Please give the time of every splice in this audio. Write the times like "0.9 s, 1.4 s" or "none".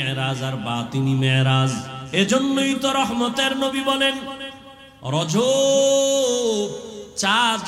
1.9 s